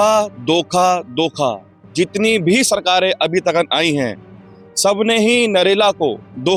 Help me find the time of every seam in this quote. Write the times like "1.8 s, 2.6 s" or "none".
none